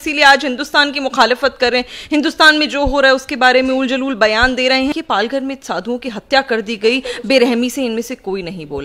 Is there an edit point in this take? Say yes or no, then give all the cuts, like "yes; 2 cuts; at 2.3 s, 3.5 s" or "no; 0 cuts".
yes; 1 cut; at 4.9 s